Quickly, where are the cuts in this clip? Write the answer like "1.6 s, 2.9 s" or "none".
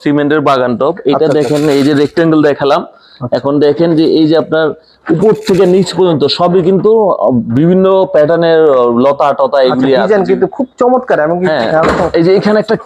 none